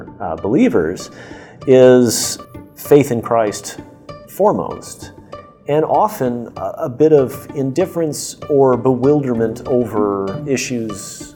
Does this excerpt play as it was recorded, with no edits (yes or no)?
no